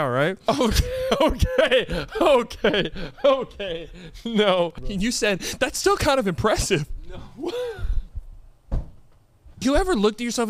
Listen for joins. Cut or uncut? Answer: cut